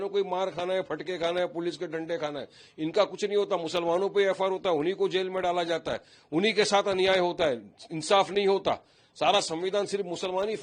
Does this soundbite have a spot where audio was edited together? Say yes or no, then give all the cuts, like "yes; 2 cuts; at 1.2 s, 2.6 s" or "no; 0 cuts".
no; 0 cuts